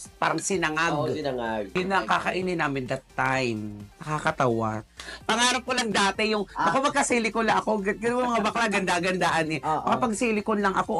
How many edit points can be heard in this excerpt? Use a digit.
1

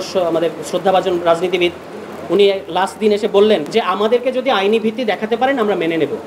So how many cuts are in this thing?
1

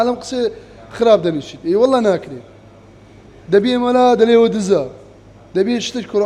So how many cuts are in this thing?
0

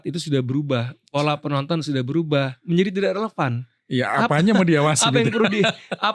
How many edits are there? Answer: 1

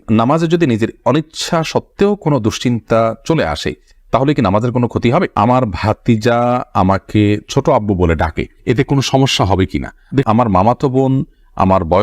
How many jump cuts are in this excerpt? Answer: 2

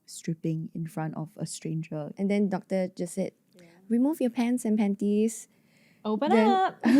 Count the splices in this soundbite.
1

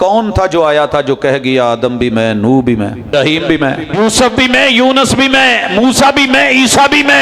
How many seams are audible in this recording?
2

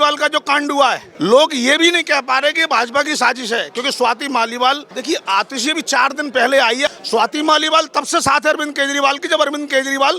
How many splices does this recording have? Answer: 3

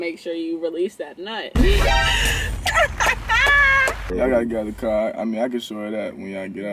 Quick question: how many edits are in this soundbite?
1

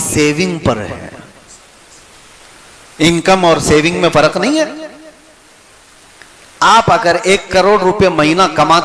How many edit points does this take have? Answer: 0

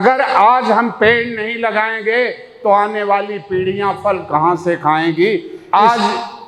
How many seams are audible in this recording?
1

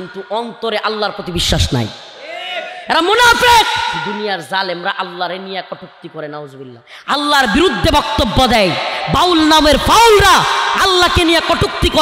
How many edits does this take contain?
1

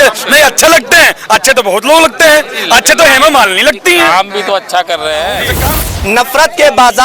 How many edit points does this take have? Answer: 1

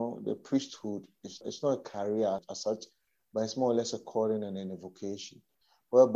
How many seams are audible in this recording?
2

